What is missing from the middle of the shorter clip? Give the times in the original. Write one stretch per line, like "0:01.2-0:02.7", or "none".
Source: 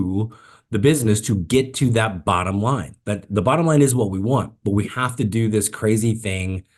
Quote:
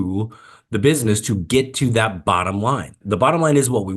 0:02.9-0:03.2